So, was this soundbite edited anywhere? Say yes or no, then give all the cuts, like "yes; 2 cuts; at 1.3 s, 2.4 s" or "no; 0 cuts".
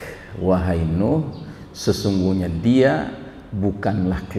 no; 0 cuts